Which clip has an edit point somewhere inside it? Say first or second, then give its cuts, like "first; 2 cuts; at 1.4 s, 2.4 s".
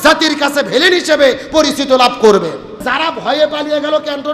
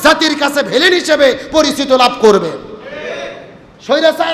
first; 1 cut; at 2.8 s